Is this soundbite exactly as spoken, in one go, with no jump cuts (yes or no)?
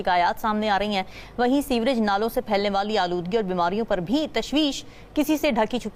yes